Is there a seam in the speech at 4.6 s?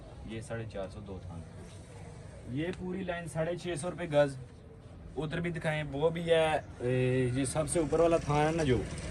no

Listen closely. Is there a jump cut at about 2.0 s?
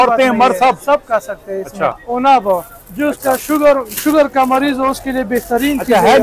yes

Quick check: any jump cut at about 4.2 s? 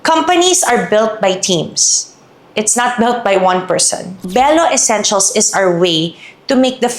yes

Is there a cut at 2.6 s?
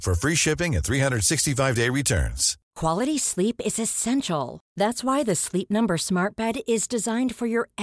yes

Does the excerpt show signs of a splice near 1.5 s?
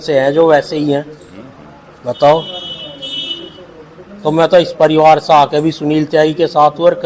no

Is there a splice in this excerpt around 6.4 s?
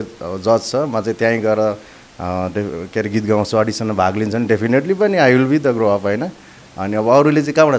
no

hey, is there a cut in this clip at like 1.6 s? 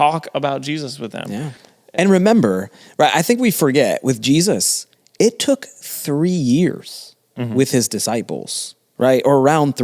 yes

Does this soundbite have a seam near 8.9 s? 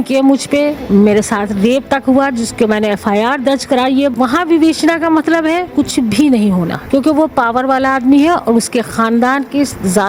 no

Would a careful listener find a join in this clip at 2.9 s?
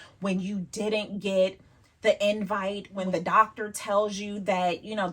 yes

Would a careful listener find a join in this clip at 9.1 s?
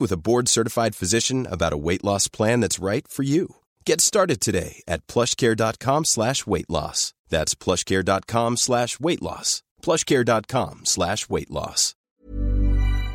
no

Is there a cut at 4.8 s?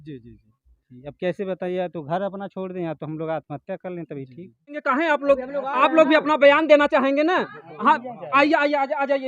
yes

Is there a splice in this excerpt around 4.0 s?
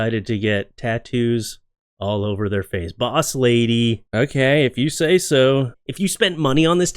no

